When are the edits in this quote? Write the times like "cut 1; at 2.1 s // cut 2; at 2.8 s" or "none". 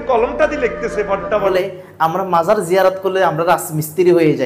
cut 1; at 1.5 s

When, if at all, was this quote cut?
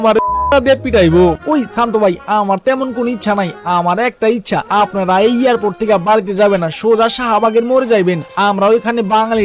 cut 1; at 1.4 s

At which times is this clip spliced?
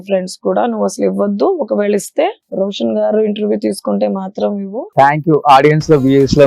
cut 1; at 2.4 s // cut 2; at 4.9 s

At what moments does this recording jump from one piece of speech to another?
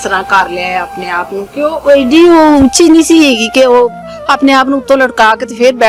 none

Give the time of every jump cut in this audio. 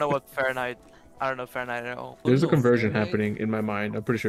cut 1; at 2.2 s

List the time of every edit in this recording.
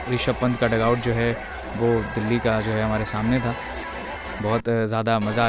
none

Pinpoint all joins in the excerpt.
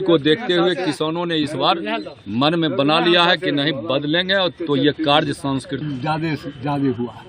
cut 1; at 5.8 s

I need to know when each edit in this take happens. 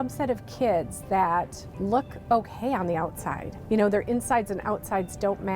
cut 1; at 1.6 s // cut 2; at 3.5 s

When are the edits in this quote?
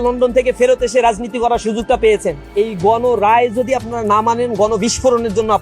cut 1; at 2.4 s

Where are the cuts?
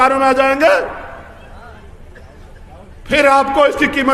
none

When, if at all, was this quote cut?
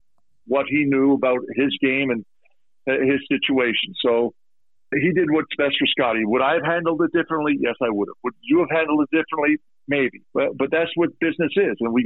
cut 1; at 10.2 s

